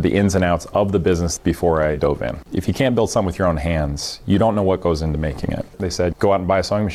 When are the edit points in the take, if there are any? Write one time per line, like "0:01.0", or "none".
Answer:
0:01.3
0:02.5
0:05.8